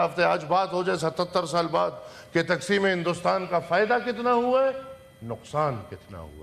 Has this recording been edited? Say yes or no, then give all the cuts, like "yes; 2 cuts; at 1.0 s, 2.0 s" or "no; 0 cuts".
no; 0 cuts